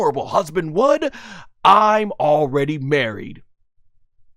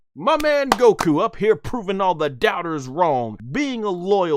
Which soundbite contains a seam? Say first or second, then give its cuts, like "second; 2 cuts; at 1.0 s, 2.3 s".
second; 1 cut; at 3.4 s